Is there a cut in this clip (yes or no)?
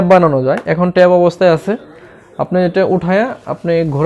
no